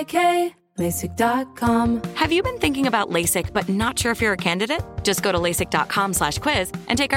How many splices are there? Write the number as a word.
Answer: one